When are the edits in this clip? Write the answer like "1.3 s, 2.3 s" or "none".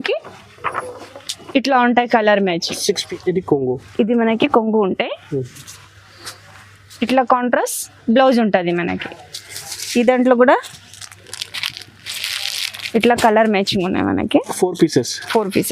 3.0 s